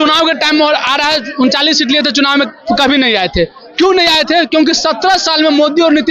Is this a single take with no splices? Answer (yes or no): yes